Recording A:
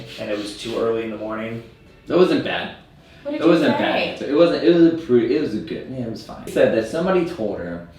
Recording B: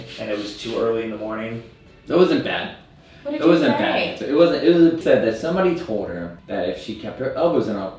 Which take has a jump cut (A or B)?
B